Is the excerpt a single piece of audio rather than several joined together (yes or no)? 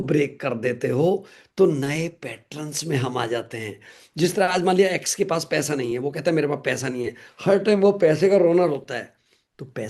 yes